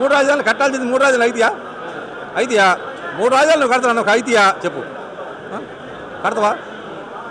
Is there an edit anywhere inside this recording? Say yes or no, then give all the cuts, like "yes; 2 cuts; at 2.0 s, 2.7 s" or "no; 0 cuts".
no; 0 cuts